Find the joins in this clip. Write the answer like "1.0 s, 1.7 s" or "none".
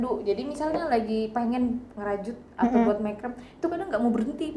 none